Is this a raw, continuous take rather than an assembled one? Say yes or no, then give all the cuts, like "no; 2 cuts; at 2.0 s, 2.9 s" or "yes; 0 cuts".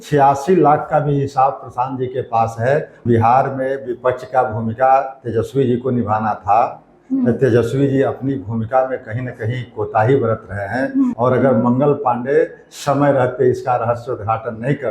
no; 2 cuts; at 3.0 s, 11.1 s